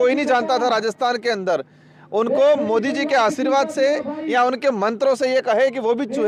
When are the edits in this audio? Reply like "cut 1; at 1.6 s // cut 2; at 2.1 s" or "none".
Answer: none